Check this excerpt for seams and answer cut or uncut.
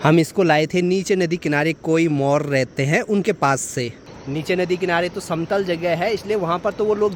uncut